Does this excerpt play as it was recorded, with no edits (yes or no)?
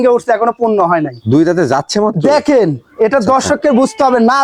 yes